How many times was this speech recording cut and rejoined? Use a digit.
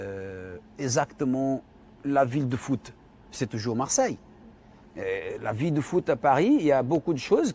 1